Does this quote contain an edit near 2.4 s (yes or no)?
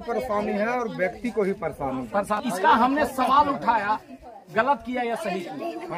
yes